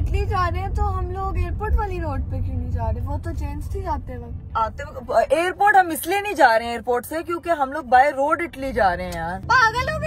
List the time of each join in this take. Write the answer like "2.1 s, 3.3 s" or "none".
none